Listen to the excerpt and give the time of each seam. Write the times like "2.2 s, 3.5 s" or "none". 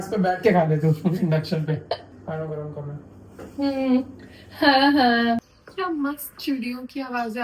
2.0 s, 5.4 s